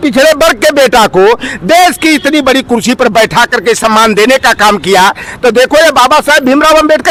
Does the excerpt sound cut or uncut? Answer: uncut